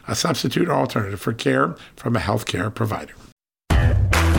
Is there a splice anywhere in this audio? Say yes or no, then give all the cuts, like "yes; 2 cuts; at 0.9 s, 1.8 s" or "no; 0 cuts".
yes; 1 cut; at 3.4 s